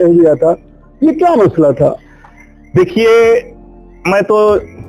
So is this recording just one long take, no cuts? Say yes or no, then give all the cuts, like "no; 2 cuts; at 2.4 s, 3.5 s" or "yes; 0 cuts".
yes; 0 cuts